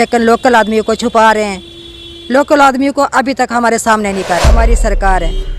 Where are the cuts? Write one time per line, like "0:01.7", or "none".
0:04.5

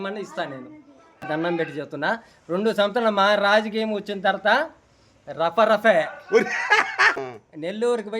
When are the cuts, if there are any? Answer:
0:01.3
0:07.2

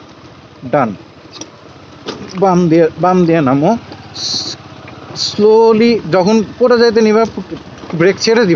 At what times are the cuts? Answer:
none

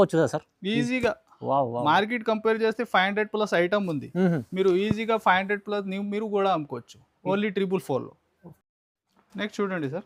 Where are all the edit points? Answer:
none

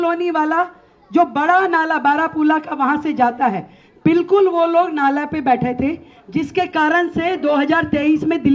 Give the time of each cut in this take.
none

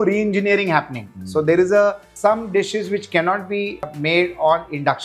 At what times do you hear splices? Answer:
0:02.1
0:03.9

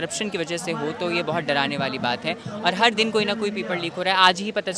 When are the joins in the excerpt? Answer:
none

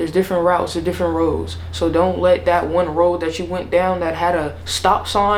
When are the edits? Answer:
none

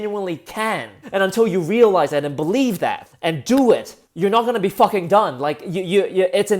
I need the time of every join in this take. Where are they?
0:00.9
0:03.1
0:04.0

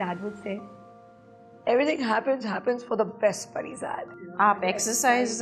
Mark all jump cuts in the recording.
0:04.2

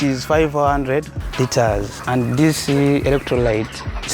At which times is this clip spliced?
0:01.2
0:01.9

